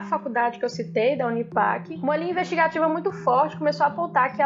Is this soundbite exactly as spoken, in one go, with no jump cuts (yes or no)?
no